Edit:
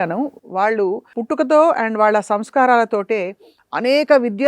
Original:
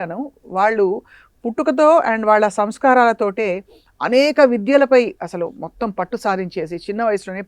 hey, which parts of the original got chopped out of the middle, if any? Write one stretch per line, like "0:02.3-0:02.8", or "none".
0:01.1-0:01.4